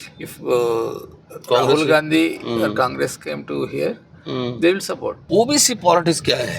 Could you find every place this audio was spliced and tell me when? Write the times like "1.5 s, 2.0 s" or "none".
5.2 s